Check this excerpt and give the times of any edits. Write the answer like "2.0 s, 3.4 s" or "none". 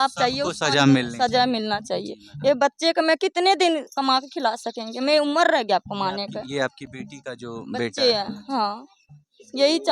none